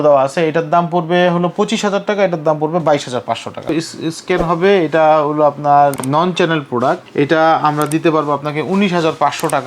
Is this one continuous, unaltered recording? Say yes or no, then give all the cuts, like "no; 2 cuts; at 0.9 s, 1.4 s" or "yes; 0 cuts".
no; 3 cuts; at 3.7 s, 6.0 s, 7.0 s